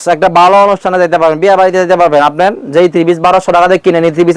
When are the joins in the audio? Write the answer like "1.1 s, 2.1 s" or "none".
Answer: none